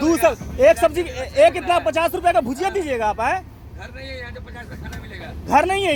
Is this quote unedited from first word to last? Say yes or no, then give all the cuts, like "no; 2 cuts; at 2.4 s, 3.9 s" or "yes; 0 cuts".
yes; 0 cuts